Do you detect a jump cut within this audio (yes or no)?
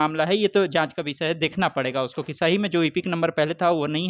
no